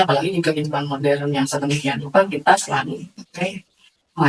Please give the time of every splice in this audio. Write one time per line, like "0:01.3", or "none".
none